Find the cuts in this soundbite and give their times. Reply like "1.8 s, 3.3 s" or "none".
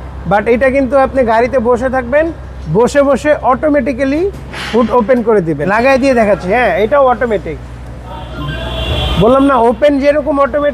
5.6 s